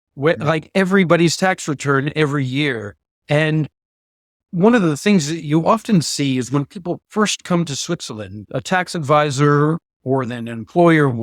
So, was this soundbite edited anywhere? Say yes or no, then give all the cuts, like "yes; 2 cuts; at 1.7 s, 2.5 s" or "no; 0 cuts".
no; 0 cuts